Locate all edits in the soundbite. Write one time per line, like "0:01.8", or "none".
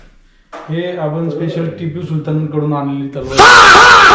none